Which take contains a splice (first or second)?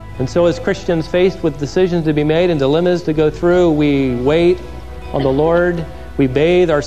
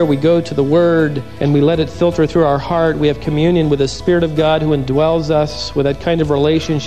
second